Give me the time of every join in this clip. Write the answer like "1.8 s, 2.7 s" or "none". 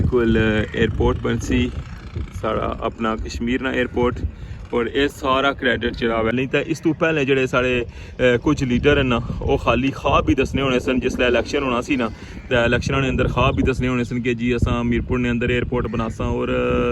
6.3 s